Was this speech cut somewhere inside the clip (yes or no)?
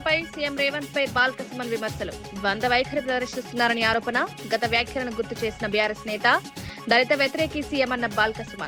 no